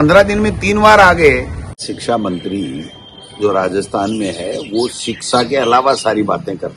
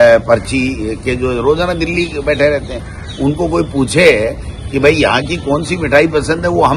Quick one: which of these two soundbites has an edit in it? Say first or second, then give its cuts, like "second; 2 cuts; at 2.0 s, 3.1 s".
first; 1 cut; at 1.8 s